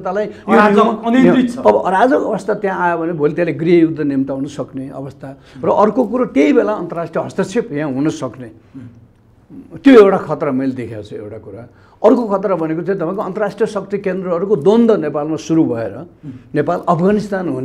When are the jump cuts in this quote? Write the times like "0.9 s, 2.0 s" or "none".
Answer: none